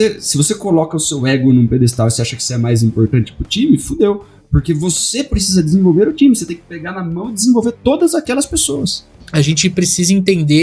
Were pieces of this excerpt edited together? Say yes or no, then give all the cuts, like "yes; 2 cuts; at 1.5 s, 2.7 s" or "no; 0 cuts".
yes; 1 cut; at 9.0 s